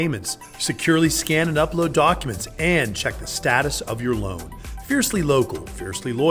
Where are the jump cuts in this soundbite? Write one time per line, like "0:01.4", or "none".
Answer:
none